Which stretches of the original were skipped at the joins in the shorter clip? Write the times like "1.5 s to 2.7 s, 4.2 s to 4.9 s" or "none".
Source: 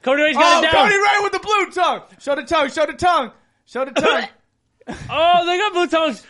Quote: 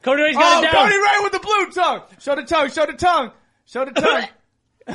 none